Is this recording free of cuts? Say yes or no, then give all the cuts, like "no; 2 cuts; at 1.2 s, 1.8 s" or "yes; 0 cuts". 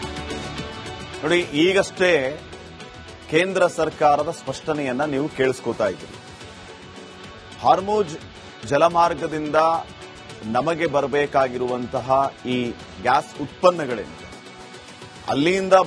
no; 1 cut; at 1.0 s